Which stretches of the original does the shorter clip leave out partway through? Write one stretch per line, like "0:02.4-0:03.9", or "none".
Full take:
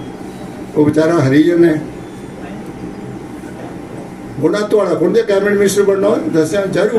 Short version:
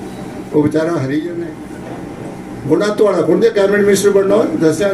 0:01.6-0:03.1